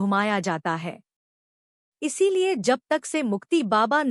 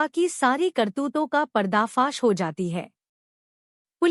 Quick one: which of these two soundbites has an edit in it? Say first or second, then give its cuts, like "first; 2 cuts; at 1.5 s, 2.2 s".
first; 1 cut; at 1.8 s